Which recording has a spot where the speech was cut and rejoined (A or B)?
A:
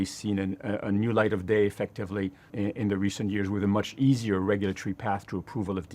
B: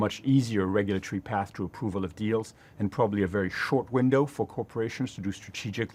A